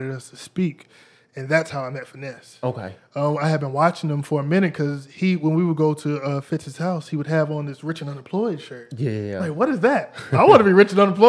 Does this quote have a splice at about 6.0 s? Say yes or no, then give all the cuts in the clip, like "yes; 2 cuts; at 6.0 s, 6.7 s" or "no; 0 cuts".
no; 0 cuts